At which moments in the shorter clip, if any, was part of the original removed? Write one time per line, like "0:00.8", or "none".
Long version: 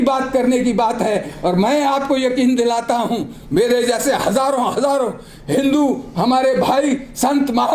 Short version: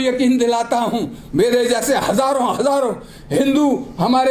none

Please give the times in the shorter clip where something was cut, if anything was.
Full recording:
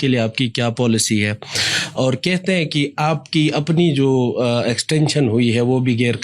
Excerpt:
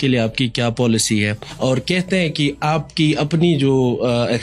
0:01.4

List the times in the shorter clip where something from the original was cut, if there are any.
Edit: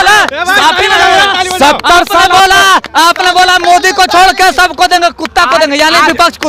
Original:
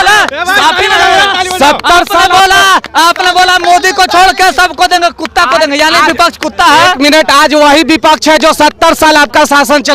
none

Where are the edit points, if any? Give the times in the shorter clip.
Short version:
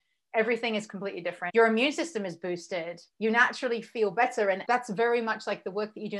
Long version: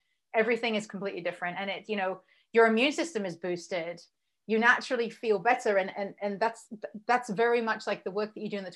0:01.4
0:03.0
0:04.6

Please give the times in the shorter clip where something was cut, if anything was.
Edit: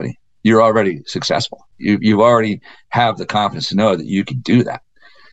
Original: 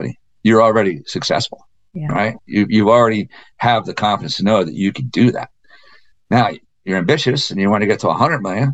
0:01.7

